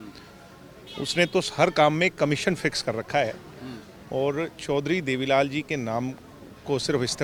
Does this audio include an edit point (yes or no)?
no